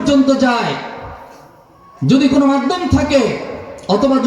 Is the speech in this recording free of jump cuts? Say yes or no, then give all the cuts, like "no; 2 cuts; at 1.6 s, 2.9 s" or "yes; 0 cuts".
yes; 0 cuts